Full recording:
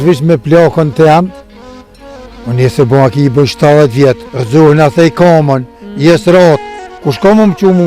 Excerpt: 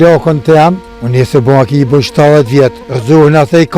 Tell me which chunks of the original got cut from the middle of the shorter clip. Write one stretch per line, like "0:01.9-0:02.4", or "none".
0:01.4-0:02.4